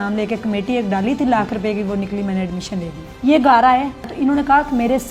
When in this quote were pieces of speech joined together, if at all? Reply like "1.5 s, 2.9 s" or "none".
3.0 s, 4.1 s